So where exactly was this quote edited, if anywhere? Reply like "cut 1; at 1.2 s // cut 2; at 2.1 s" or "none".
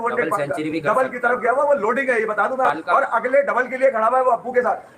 none